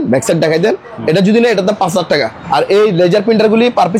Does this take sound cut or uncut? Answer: cut